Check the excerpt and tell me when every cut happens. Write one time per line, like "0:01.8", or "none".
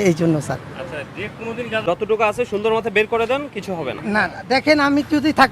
0:01.8